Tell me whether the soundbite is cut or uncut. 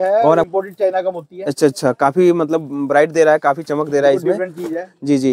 uncut